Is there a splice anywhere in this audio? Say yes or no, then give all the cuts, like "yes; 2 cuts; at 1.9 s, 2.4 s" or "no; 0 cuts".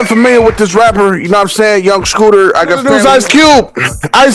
yes; 1 cut; at 2.9 s